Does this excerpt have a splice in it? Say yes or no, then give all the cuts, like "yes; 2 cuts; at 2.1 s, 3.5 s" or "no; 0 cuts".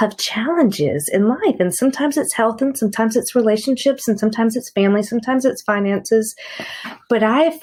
no; 0 cuts